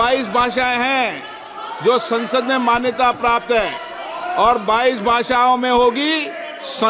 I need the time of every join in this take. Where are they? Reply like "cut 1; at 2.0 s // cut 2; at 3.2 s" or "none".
none